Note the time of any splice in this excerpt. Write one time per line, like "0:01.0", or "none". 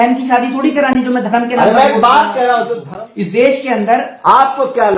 0:02.9

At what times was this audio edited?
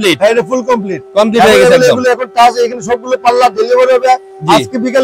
none

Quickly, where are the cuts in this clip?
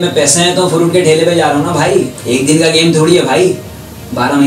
0:02.2

